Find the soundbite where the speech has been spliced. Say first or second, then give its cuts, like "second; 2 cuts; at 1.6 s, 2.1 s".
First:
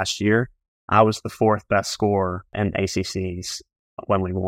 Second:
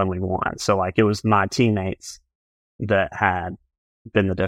first; 1 cut; at 2.4 s